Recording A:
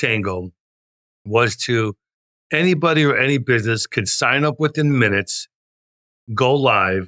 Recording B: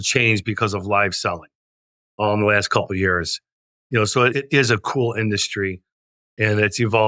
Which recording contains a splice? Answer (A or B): B